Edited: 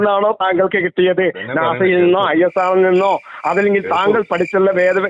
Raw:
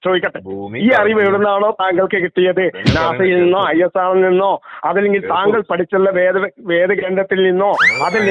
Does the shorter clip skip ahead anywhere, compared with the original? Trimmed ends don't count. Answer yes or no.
no